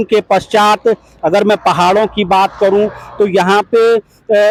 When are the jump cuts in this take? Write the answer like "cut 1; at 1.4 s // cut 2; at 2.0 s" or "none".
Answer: none